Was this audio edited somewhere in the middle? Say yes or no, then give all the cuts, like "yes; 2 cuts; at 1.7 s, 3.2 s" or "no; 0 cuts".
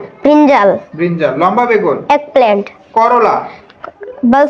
no; 0 cuts